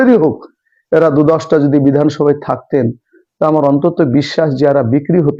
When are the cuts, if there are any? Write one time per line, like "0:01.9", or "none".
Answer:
none